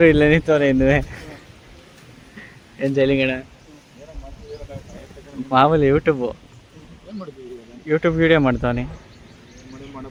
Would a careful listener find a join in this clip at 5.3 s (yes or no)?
no